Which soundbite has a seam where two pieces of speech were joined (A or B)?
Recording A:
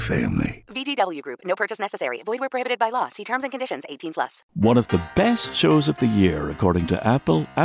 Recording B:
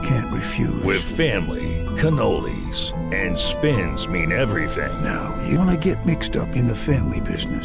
A